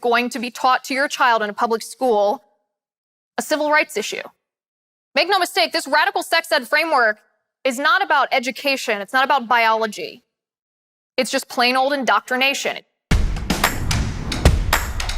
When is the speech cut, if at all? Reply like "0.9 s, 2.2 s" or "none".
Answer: 12.9 s